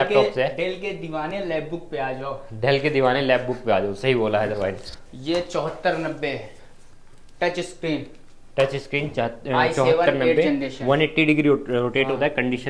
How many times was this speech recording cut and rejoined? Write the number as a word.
one